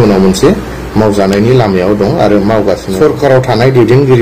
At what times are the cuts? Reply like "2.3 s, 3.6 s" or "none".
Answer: 3.0 s